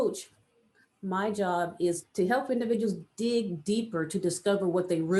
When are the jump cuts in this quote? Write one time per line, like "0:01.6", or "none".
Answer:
0:02.0